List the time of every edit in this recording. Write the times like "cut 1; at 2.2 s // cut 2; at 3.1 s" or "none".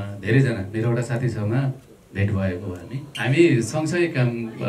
cut 1; at 3.0 s